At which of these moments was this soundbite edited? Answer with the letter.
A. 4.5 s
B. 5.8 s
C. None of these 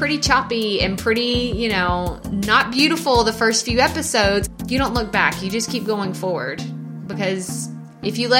A